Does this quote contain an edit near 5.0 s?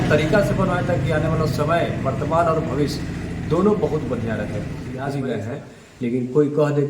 yes; 1 cut; at 5.0 s

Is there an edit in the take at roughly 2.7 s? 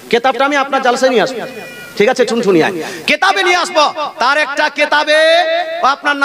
no; 0 cuts

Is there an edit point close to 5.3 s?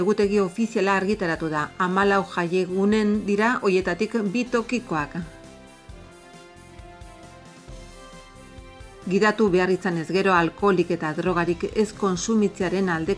yes; 2 cuts; at 5.3 s, 8.7 s

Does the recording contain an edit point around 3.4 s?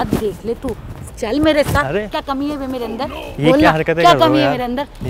no; 1 cut; at 0.9 s

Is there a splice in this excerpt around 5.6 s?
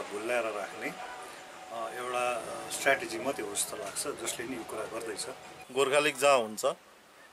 yes; 1 cut; at 5.6 s

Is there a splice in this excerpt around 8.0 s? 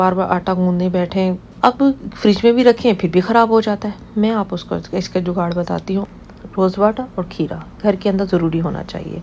no; 2 cuts; at 1.5 s, 6.1 s

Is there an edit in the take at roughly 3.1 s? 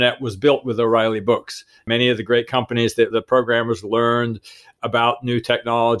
yes; 2 cuts; at 1.8 s, 3.1 s

